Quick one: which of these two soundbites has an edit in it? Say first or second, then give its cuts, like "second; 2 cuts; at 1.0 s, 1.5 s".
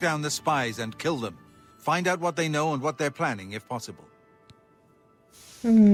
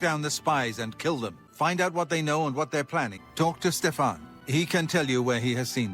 second; 3 cuts; at 1.4 s, 3.2 s, 4.3 s